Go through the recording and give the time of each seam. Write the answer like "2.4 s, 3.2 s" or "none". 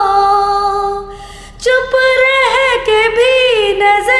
none